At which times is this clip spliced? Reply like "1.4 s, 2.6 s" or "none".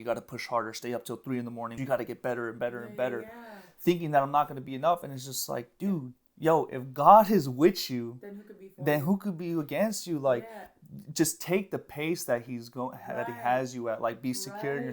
1.7 s